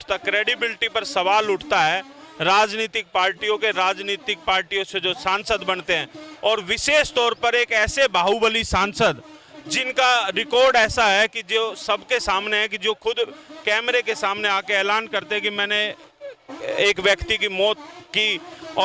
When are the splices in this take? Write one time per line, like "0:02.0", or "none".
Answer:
none